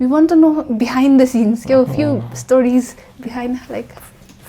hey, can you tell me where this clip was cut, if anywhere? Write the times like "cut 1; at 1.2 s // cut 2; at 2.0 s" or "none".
none